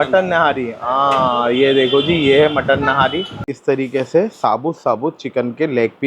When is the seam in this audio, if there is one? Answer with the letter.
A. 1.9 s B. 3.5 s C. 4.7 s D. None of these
B